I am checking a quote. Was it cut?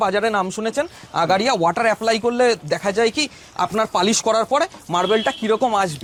no; 0 cuts

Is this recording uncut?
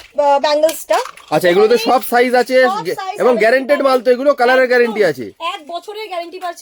yes; 0 cuts

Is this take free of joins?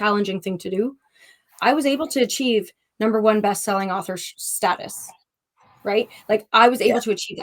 yes; 0 cuts

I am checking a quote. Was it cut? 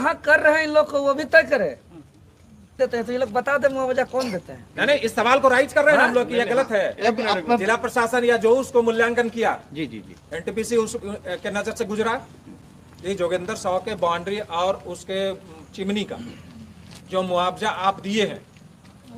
yes; 1 cut; at 2.7 s

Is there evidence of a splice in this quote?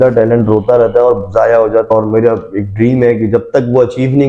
yes; 1 cut; at 1.9 s

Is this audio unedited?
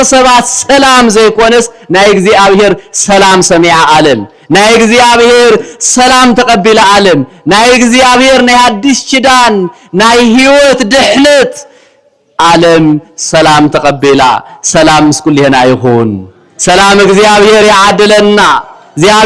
yes; 0 cuts

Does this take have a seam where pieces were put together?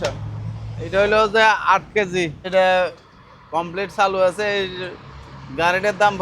yes; 1 cut; at 2.5 s

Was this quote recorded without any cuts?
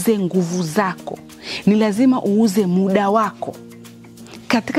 yes; 0 cuts

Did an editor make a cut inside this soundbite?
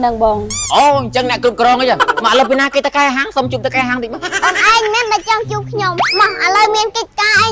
yes; 3 cuts; at 2.2 s, 4.1 s, 6.0 s

